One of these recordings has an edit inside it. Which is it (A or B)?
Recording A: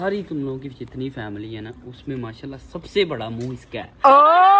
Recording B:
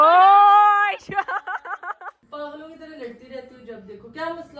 B